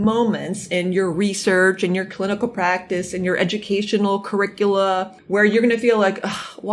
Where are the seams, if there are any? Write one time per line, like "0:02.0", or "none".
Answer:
0:05.1